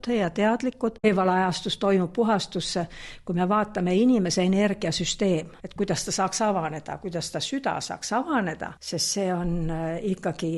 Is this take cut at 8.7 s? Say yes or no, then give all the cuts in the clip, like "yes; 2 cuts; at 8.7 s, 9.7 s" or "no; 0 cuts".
yes; 3 cuts; at 1.0 s, 5.6 s, 8.7 s